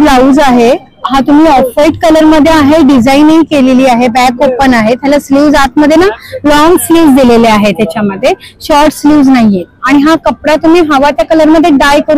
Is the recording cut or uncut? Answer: uncut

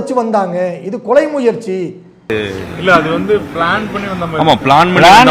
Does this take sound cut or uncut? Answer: uncut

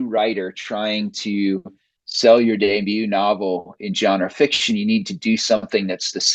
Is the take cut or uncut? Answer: uncut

